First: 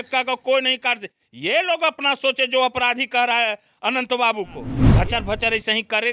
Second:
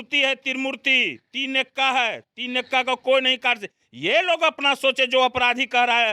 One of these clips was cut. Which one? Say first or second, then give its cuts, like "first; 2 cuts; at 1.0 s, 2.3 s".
first; 1 cut; at 4.8 s